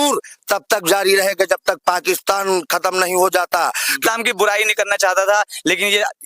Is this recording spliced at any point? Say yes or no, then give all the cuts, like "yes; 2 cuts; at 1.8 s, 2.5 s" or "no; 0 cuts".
yes; 1 cut; at 4.0 s